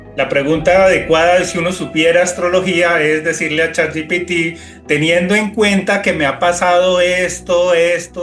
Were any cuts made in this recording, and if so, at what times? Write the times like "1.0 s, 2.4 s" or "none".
none